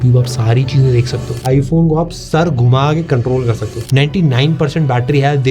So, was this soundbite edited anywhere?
yes; 2 cuts; at 1.4 s, 3.9 s

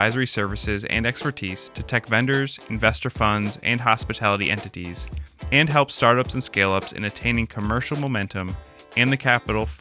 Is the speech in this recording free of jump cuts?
yes; 0 cuts

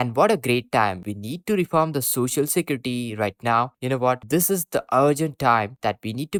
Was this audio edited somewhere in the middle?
no; 0 cuts

